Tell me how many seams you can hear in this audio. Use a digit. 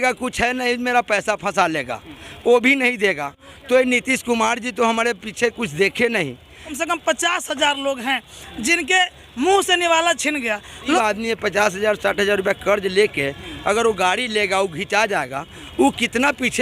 2